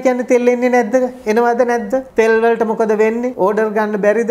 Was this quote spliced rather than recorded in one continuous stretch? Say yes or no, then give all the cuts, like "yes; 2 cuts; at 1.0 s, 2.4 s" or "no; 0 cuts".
yes; 2 cuts; at 2.1 s, 3.3 s